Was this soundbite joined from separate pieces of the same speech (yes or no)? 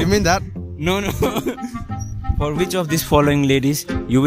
yes